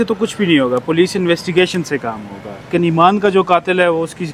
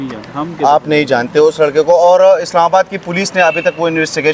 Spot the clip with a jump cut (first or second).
first